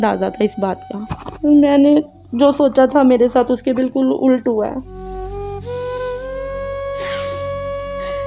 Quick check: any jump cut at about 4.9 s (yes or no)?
yes